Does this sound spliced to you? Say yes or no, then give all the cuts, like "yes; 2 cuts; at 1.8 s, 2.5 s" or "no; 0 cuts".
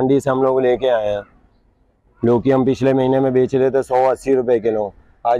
no; 0 cuts